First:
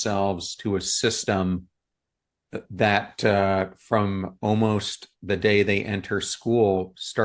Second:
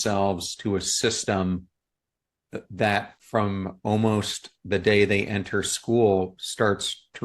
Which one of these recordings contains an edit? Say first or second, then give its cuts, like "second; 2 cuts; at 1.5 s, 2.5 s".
second; 1 cut; at 3.1 s